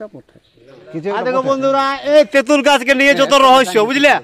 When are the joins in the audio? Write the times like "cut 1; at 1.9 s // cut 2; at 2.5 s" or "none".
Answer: cut 1; at 1.1 s